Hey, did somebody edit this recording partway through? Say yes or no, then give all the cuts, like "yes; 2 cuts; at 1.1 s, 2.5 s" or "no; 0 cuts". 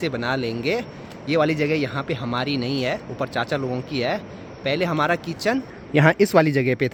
no; 0 cuts